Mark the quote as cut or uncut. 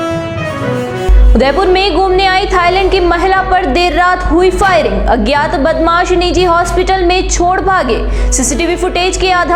uncut